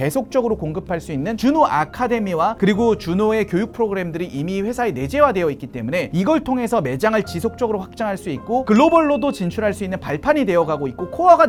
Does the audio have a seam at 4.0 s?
no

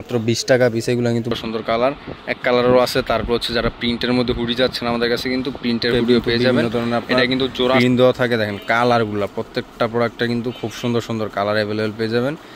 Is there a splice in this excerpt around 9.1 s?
no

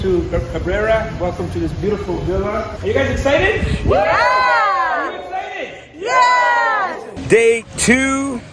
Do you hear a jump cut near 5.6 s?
no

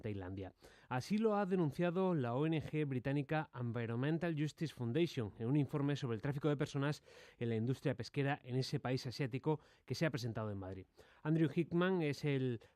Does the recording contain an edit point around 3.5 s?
yes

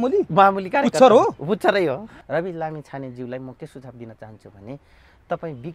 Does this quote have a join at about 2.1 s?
yes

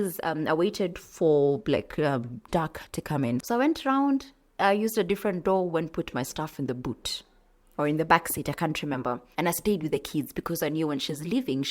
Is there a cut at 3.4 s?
yes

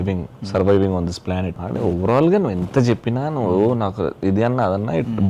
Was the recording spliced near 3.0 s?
no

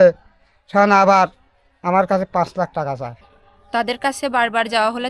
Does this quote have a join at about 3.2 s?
yes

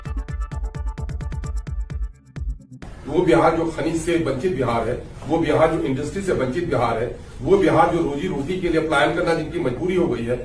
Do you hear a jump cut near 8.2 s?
no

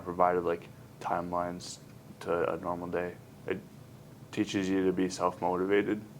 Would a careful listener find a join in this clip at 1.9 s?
no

